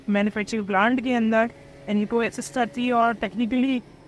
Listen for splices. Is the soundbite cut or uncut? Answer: uncut